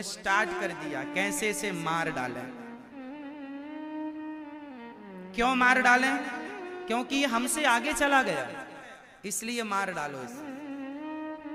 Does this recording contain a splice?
no; 0 cuts

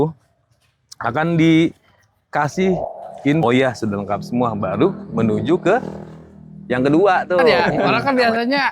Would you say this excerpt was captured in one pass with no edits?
no; 2 cuts; at 3.4 s, 7.6 s

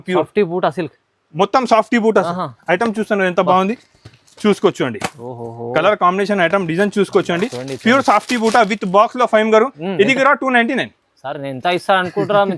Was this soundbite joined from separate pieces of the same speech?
no; 0 cuts

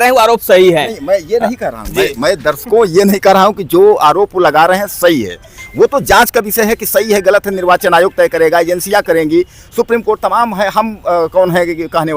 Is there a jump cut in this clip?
no; 0 cuts

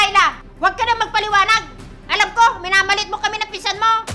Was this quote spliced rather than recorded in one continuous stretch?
no; 0 cuts

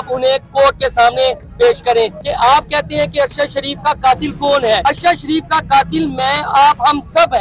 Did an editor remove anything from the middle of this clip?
yes; 2 cuts; at 2.2 s, 4.8 s

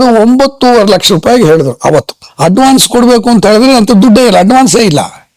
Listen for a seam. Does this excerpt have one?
yes; 1 cut; at 2.2 s

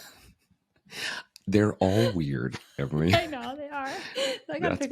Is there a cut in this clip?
no; 0 cuts

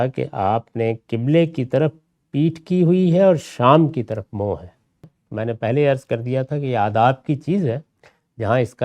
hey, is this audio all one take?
no; 1 cut; at 5.2 s

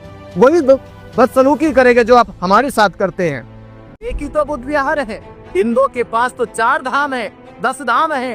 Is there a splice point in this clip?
yes; 1 cut; at 4.1 s

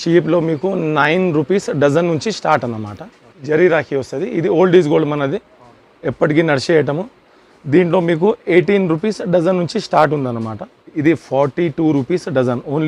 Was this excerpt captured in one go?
no; 2 cuts; at 3.4 s, 11.0 s

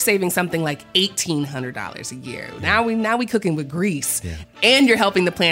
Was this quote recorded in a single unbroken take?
no; 1 cut; at 4.5 s

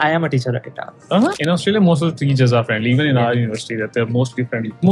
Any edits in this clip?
yes; 1 cut; at 1.3 s

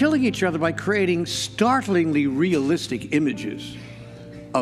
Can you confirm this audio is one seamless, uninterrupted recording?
yes; 0 cuts

